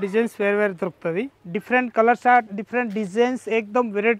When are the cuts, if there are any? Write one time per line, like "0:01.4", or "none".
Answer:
0:01.4